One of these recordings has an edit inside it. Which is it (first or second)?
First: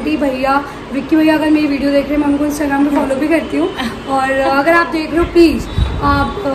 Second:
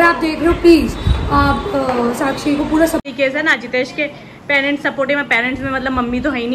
second